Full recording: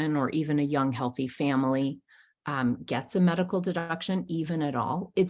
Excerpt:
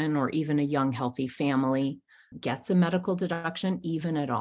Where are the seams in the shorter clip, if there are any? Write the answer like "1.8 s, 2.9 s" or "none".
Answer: 2.4 s

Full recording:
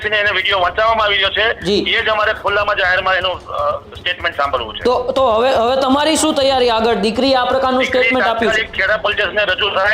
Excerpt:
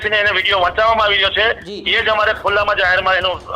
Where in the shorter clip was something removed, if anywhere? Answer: none

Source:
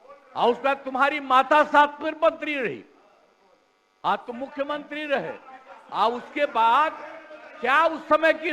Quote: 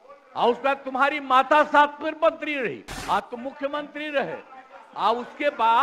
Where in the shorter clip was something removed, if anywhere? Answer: 2.9 s

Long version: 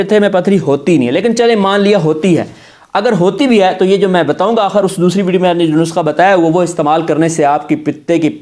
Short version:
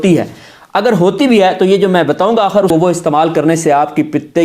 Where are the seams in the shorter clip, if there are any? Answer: 2.7 s

